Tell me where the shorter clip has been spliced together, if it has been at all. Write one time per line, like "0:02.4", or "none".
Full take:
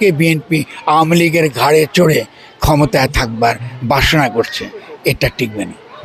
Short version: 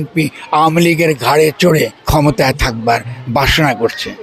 0:02.0